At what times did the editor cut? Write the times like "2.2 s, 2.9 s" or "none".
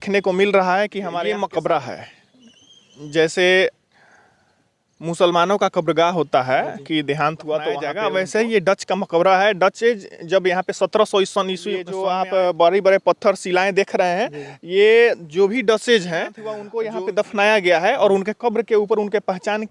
1.1 s, 7.9 s, 11.9 s, 16.6 s

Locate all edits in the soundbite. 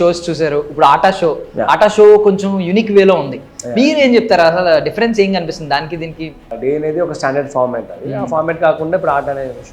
6.5 s

